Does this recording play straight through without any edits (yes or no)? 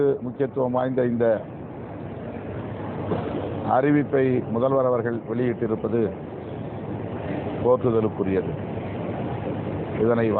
yes